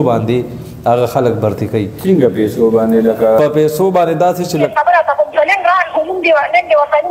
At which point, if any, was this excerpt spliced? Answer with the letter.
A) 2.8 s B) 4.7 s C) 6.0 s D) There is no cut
B